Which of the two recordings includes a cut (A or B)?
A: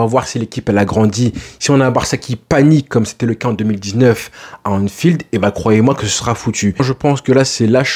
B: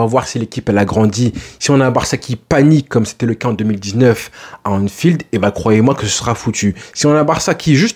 A